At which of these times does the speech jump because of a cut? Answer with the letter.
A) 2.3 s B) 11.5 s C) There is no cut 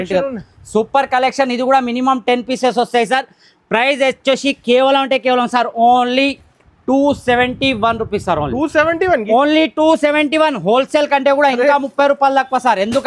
C